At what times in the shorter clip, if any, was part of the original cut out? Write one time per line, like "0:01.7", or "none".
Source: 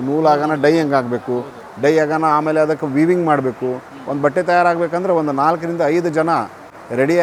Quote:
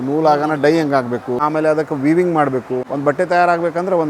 0:01.4
0:02.8